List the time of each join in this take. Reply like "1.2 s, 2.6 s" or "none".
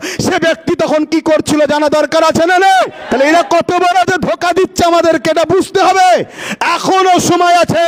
3.0 s